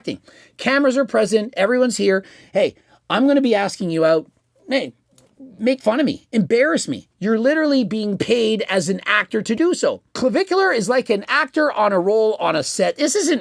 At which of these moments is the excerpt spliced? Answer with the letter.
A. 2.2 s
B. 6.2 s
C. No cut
C